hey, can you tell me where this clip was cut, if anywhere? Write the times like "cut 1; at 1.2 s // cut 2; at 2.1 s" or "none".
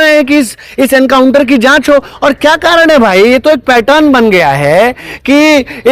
none